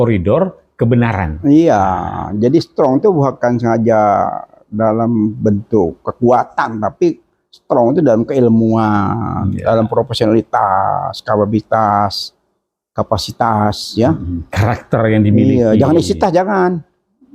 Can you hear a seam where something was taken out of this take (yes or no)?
no